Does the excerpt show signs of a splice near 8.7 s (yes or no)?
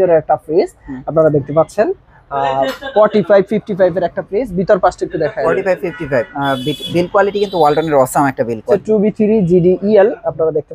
yes